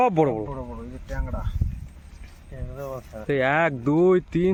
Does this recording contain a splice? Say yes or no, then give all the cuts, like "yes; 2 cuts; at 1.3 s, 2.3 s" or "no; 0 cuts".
no; 0 cuts